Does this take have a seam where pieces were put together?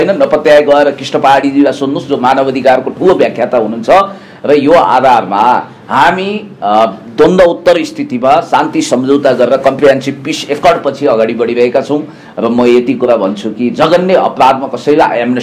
no; 0 cuts

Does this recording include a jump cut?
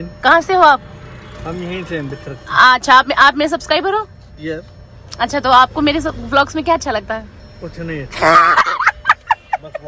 no; 0 cuts

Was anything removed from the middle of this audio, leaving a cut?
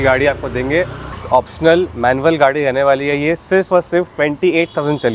yes; 1 cut; at 1.2 s

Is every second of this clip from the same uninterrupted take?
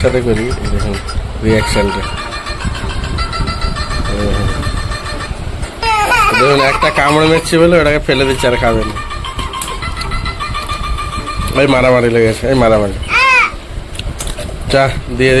no; 1 cut; at 5.8 s

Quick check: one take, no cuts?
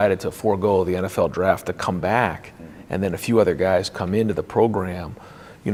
yes; 0 cuts

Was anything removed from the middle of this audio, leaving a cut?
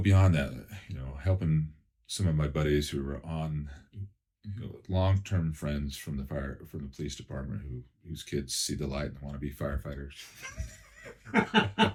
no; 0 cuts

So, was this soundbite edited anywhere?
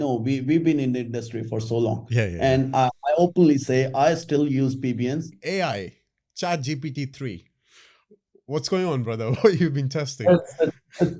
yes; 1 cut; at 5.3 s

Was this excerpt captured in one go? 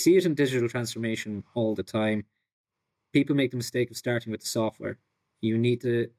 yes; 0 cuts

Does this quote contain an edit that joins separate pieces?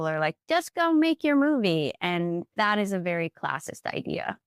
no; 0 cuts

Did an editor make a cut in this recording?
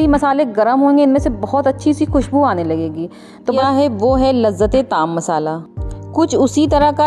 yes; 1 cut; at 3.6 s

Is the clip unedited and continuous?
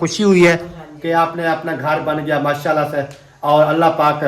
yes; 0 cuts

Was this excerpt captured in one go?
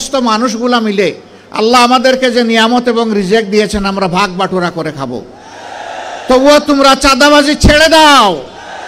yes; 0 cuts

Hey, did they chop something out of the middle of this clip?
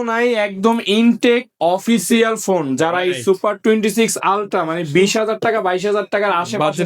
no; 0 cuts

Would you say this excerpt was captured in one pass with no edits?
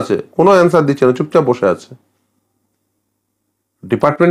yes; 0 cuts

